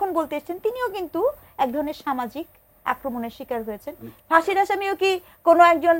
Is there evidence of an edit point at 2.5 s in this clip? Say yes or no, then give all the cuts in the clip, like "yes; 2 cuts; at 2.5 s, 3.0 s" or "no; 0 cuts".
no; 1 cut; at 4.1 s